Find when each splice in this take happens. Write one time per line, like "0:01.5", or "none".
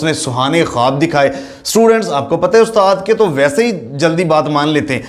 none